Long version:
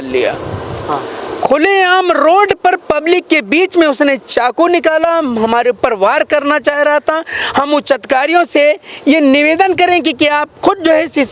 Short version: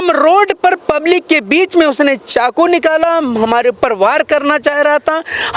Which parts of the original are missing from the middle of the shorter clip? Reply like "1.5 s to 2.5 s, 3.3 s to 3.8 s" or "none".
none